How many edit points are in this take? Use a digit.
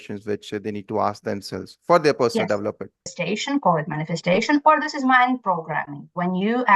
1